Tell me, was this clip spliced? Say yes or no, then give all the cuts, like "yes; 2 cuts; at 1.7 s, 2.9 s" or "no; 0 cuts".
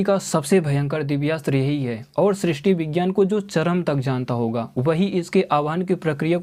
no; 0 cuts